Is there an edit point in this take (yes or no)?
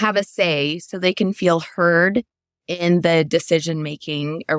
no